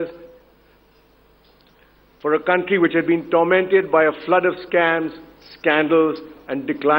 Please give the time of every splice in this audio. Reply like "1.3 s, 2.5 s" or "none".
2.3 s